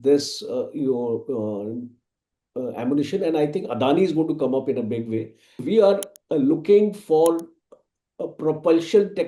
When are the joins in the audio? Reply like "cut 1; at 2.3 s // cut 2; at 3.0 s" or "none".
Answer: cut 1; at 5.6 s